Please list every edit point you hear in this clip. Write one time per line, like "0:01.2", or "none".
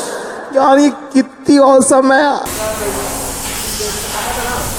none